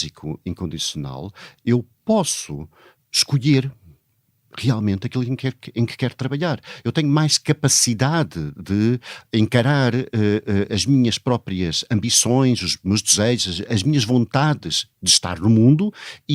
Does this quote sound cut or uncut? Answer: uncut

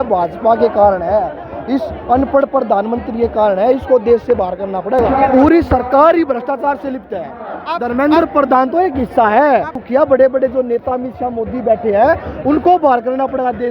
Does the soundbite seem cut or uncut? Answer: cut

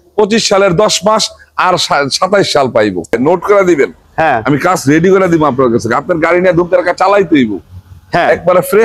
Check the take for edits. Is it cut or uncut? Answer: cut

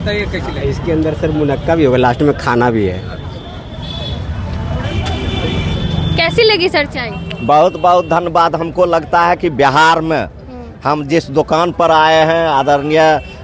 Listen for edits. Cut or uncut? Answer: uncut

